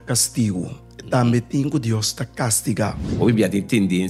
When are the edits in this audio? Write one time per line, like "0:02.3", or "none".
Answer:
0:03.0